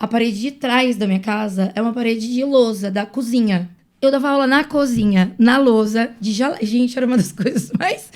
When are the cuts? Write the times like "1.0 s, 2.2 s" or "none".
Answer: 3.8 s